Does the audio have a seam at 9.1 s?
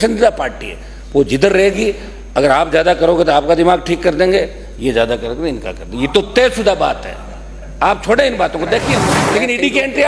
yes; 1 cut; at 9.1 s

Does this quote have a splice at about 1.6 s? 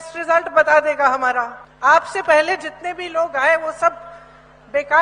yes; 1 cut; at 1.6 s

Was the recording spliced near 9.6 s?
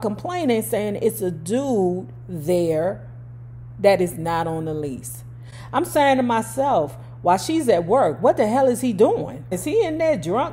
yes; 1 cut; at 9.6 s

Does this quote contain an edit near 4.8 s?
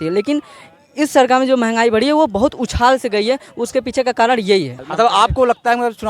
yes; 1 cut; at 4.8 s

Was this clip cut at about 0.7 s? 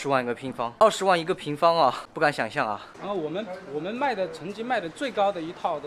yes; 3 cuts; at 0.7 s, 2.1 s, 2.9 s

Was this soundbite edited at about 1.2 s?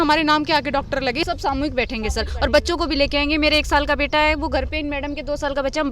yes; 1 cut; at 1.2 s

